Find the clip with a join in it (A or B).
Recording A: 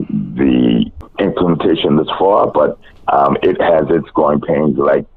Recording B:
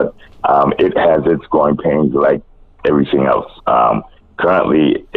A